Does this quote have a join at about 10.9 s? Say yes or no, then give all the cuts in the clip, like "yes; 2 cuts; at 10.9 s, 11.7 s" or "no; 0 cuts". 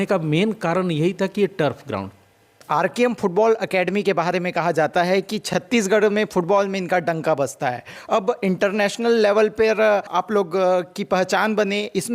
no; 1 cut; at 2.5 s